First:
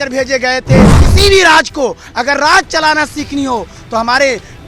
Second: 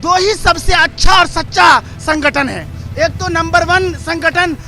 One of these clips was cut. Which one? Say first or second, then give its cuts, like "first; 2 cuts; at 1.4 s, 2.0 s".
first; 1 cut; at 1.0 s